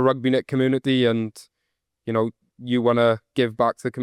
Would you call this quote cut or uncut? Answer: uncut